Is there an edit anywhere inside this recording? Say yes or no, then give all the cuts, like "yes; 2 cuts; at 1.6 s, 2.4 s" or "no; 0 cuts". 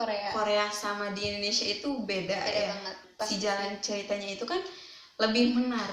yes; 1 cut; at 3.0 s